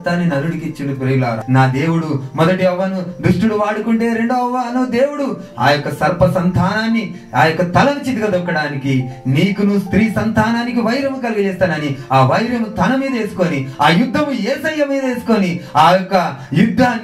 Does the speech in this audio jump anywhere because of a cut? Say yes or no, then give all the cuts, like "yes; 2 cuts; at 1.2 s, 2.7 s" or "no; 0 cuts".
yes; 1 cut; at 1.4 s